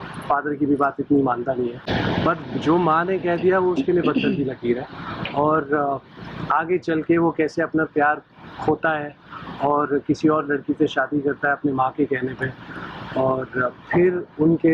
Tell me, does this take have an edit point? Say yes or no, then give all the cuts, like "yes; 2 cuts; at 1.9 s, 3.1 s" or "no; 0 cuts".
no; 0 cuts